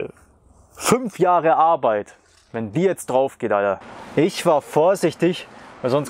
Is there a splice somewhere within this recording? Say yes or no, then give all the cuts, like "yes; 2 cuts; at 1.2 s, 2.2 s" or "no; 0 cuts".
yes; 1 cut; at 3.8 s